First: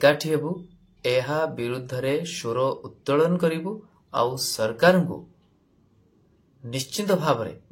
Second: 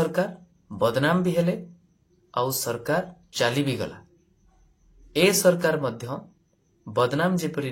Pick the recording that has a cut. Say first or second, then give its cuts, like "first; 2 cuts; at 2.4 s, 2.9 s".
second; 1 cut; at 3.2 s